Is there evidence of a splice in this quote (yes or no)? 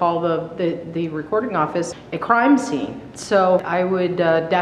yes